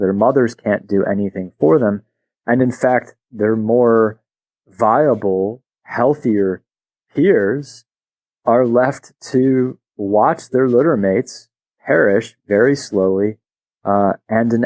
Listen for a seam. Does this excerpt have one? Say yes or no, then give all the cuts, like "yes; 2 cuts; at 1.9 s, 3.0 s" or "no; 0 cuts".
no; 0 cuts